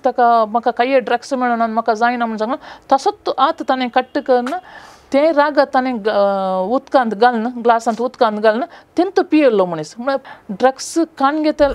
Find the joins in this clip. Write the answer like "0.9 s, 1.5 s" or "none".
10.2 s

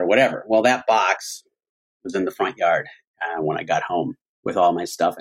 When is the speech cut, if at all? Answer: 4.3 s

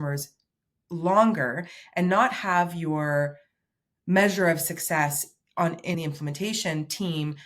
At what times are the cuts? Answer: 5.9 s

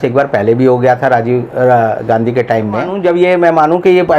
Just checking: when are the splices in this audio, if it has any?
2.9 s

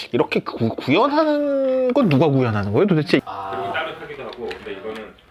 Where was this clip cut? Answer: 3.2 s

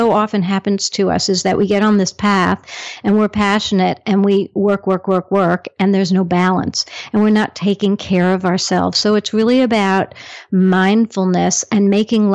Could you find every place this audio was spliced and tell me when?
none

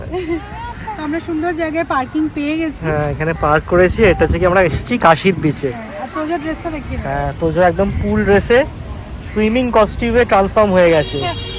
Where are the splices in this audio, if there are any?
none

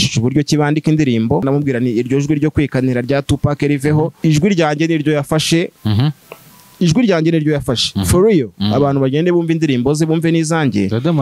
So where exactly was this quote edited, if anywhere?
1.4 s, 4.1 s

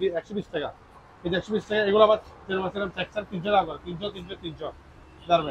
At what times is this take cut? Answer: none

